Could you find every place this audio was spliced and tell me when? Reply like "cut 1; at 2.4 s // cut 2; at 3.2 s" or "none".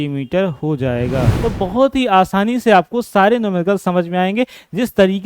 cut 1; at 1.3 s